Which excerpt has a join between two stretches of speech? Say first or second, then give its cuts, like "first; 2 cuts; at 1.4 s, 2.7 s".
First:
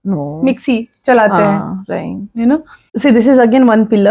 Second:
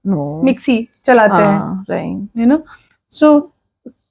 first; 1 cut; at 2.8 s